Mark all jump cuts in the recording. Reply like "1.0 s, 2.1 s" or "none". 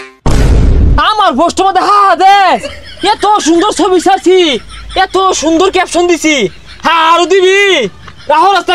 0.9 s

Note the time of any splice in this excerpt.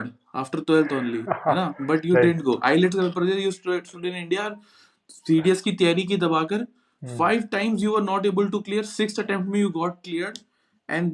none

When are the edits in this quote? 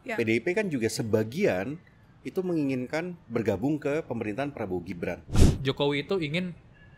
5.4 s

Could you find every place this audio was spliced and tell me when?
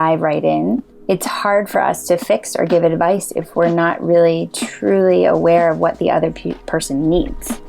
0.9 s

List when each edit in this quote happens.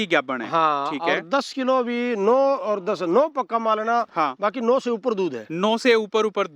none

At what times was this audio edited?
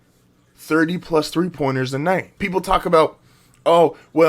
2.3 s

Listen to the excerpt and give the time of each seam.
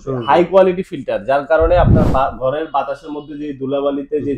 none

